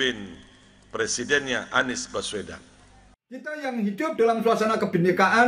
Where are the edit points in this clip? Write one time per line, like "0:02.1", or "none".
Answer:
0:03.4

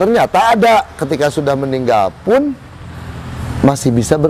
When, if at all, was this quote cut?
none

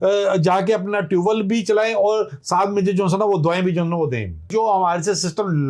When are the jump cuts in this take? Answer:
0:04.5

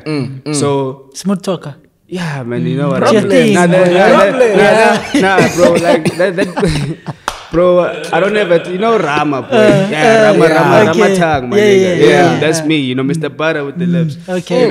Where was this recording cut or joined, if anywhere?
none

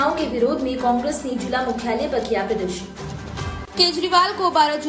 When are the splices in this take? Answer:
0:03.7

